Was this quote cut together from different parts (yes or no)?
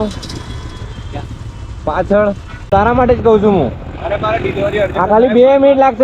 yes